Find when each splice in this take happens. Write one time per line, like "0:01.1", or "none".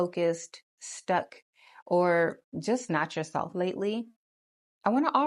none